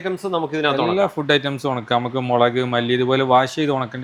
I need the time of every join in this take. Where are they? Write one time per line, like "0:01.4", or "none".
none